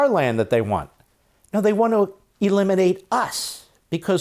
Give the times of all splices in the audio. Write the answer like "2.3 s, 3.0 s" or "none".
none